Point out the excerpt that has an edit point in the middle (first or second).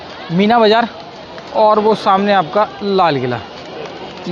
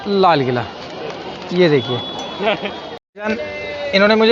second